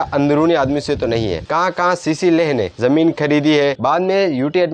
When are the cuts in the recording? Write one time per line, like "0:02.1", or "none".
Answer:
0:01.4
0:03.8